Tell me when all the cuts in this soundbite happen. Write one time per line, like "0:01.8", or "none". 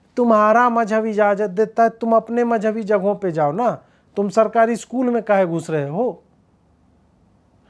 none